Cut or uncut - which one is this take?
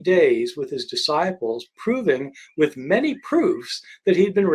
uncut